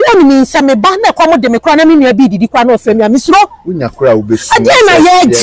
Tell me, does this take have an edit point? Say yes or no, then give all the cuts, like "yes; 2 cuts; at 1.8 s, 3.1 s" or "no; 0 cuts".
no; 0 cuts